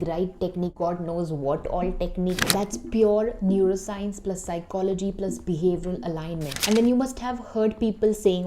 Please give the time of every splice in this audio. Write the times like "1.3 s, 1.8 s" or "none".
2.4 s, 6.6 s